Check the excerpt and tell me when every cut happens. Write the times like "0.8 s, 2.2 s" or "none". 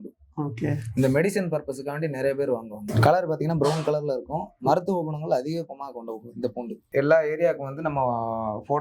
2.8 s, 6.8 s